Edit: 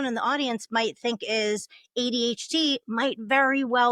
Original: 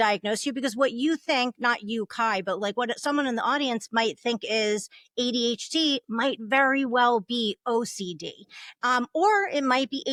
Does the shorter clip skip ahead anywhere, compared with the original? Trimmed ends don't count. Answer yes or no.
no